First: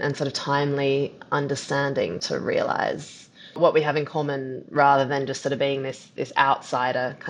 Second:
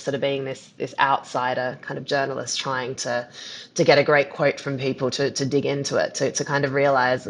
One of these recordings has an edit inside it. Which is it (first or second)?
first